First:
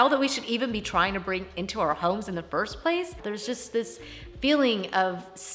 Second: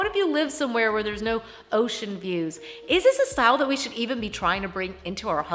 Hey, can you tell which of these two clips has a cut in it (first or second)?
first